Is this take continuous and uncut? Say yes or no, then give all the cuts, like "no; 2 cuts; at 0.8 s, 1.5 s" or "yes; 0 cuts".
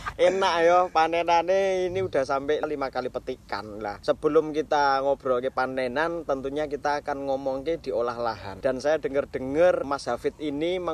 yes; 0 cuts